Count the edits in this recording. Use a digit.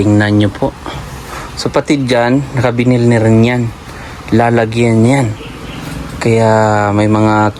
0